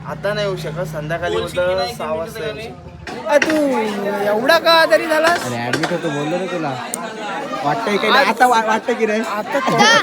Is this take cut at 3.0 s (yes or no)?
yes